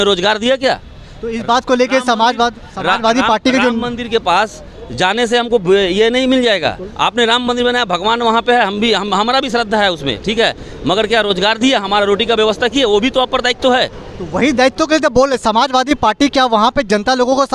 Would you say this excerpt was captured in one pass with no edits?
yes; 0 cuts

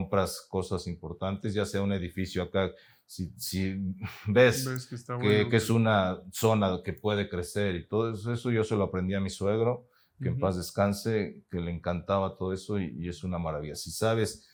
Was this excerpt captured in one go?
yes; 0 cuts

